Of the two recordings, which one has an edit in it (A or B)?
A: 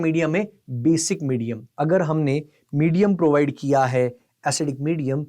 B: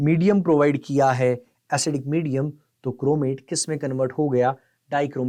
A